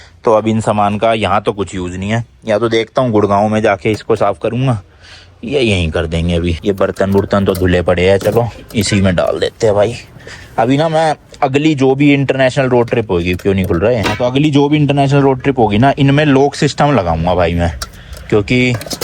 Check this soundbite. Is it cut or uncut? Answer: uncut